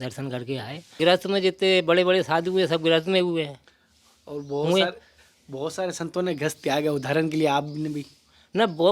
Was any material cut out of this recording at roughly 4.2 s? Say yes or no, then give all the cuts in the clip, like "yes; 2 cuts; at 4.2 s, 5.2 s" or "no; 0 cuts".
no; 1 cut; at 1.0 s